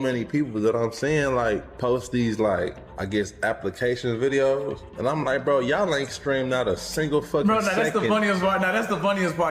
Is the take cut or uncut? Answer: uncut